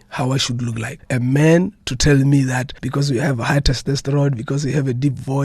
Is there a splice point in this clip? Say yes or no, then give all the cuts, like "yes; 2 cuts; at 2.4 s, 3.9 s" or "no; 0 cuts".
yes; 2 cuts; at 0.9 s, 2.8 s